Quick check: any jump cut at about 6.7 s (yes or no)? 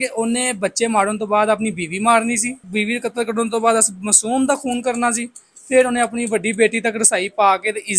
no